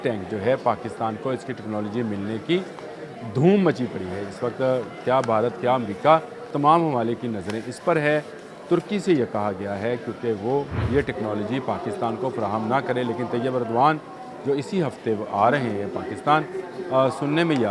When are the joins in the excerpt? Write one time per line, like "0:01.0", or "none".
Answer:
0:06.5
0:10.8